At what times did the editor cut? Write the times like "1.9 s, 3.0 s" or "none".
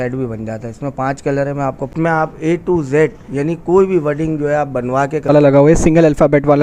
1.9 s, 5.3 s